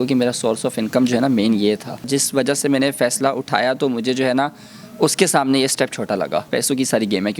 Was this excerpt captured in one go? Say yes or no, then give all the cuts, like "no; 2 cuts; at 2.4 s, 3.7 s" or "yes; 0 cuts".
no; 2 cuts; at 2.1 s, 6.5 s